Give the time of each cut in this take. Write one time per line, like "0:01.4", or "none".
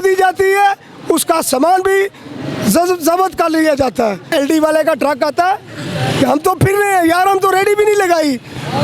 0:04.3